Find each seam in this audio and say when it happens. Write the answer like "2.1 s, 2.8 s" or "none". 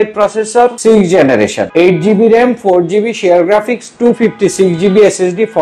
0.8 s, 1.6 s